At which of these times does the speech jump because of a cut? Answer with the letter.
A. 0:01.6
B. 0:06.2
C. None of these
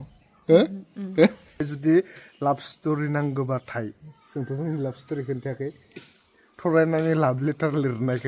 A